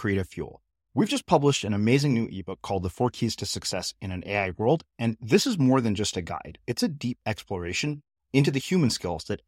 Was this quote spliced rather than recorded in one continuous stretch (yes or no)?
no